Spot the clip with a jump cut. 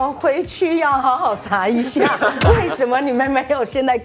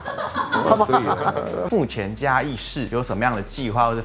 second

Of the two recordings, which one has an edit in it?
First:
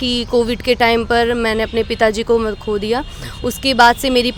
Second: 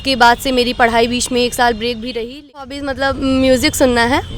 second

